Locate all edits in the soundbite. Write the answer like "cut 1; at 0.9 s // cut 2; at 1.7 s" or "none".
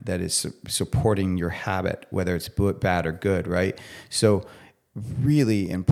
none